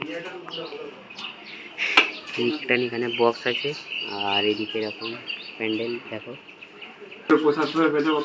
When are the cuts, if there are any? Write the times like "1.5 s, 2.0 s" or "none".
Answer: 7.3 s